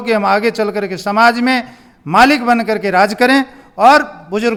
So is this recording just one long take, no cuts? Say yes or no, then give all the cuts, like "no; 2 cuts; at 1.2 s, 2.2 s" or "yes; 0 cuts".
yes; 0 cuts